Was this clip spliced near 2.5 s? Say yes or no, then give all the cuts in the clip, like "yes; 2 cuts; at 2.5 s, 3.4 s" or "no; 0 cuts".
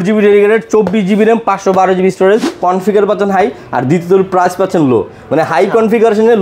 yes; 1 cut; at 2.5 s